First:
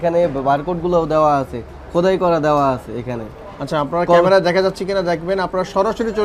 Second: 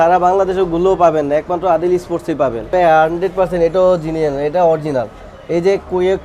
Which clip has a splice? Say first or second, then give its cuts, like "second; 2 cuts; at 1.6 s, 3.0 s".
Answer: second; 1 cut; at 2.7 s